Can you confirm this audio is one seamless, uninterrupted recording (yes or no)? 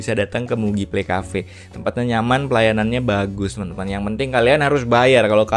yes